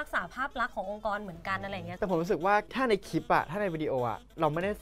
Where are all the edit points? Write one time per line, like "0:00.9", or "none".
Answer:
none